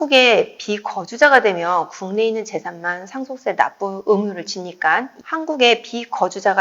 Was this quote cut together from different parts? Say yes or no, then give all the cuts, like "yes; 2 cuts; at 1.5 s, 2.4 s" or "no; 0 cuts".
yes; 2 cuts; at 4.0 s, 5.1 s